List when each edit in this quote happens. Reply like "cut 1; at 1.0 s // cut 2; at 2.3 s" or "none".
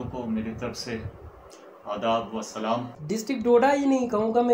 cut 1; at 3.0 s